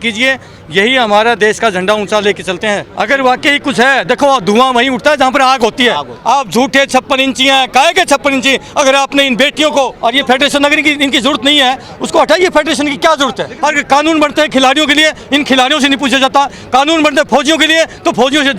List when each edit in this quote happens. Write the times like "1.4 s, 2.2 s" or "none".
2.9 s, 6.1 s, 9.9 s, 13.5 s